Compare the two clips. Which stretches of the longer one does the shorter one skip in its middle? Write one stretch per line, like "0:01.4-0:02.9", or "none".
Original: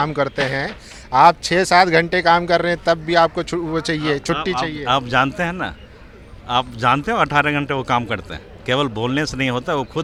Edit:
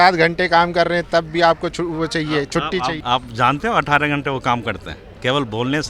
0:04.7-0:06.4

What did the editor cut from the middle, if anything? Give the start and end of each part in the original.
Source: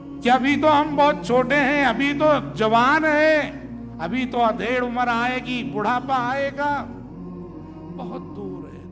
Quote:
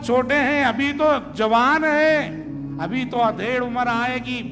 none

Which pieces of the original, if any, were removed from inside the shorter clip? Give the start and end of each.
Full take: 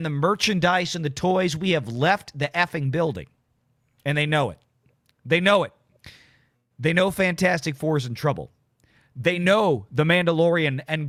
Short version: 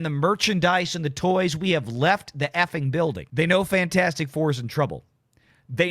0:03.2-0:06.7

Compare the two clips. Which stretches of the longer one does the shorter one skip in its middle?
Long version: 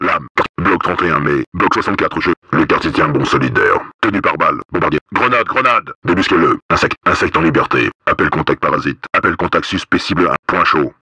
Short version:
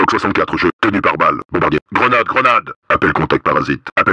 0:02.4-0:04.0
0:06.0-0:07.9

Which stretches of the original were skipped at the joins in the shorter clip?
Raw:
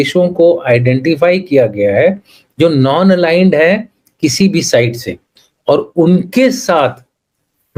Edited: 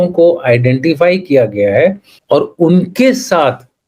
0:02.3-0:05.5

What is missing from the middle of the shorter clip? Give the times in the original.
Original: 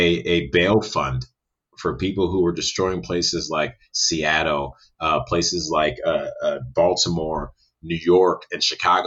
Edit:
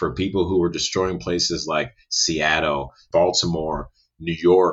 0:04.8-0:06.6

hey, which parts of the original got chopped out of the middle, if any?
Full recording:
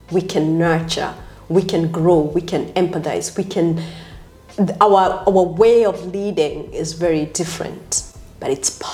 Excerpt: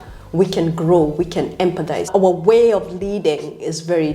0:03.2-0:05.2

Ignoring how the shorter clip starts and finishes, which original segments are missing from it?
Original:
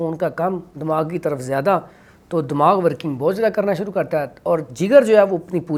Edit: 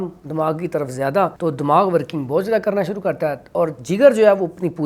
0:01.9-0:02.3

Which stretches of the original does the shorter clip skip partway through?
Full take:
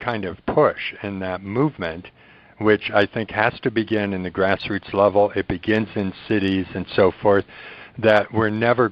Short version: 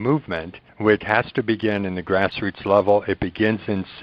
0:02.5-0:03.3

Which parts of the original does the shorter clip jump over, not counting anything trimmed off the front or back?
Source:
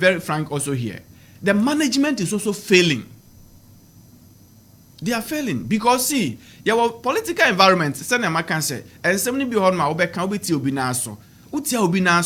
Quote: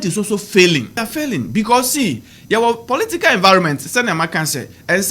0:03.2-0:05.2

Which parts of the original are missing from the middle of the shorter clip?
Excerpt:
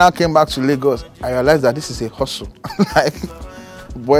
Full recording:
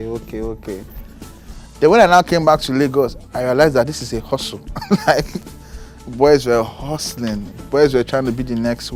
none

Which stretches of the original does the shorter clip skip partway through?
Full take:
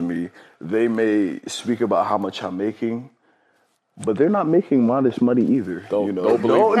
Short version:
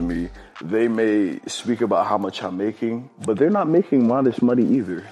0:03.1-0:03.9

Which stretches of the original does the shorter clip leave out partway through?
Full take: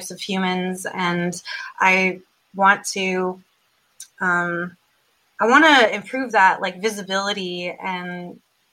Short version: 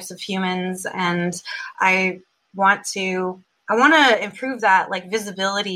0:03.5-0:05.2

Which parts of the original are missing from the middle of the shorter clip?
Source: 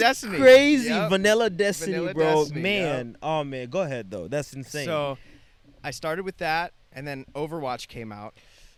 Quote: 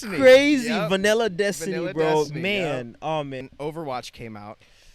0:03.7-0:07.2

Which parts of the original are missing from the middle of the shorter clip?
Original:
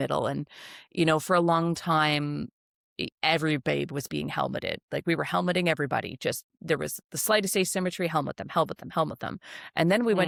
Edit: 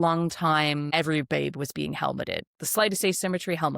0:02.4-0:03.3
0:04.8-0:07.0

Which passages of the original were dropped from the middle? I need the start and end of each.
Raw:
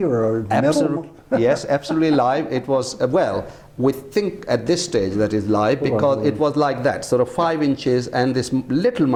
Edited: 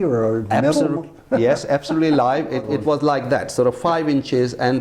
0:02.6-0:06.2

